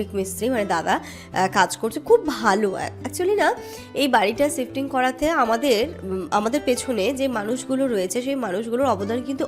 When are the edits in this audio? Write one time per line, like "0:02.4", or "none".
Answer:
none